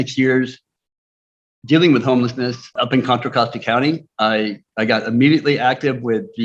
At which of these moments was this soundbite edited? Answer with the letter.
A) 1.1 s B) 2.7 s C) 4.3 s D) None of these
B